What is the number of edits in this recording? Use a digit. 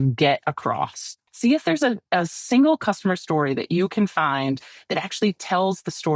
1